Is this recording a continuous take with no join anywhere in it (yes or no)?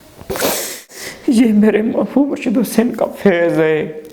no